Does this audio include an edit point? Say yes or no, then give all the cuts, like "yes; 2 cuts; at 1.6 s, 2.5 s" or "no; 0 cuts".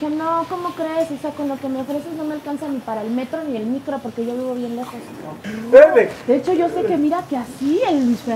yes; 1 cut; at 5.5 s